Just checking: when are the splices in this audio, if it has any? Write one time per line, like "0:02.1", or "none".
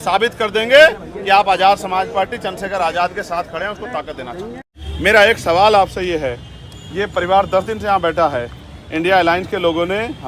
0:04.8